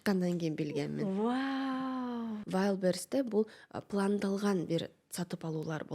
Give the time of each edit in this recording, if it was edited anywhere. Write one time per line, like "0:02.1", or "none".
0:02.4

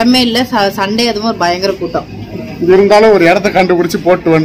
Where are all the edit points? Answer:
none

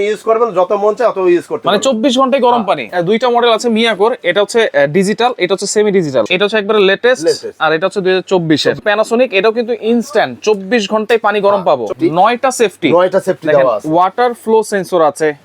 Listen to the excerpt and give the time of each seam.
0:02.9
0:06.3
0:08.8
0:11.9

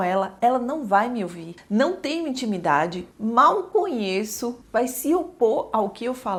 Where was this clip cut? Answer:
none

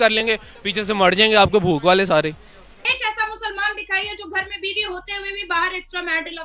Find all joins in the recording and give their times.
0:02.8

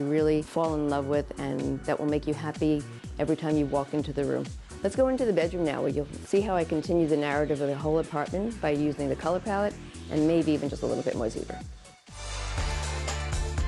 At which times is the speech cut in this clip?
none

